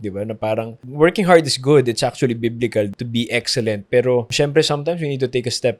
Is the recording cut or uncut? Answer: cut